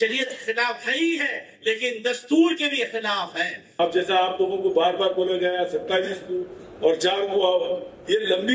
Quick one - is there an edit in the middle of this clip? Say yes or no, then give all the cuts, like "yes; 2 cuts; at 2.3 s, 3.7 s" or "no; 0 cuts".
yes; 1 cut; at 3.7 s